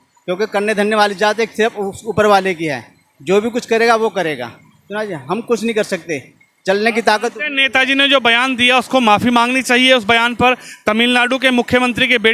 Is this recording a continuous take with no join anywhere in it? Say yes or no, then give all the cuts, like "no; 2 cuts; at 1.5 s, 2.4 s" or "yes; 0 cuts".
yes; 0 cuts